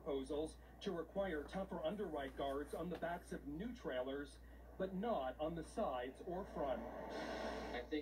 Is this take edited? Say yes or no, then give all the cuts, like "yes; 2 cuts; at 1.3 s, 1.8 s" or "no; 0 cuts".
no; 0 cuts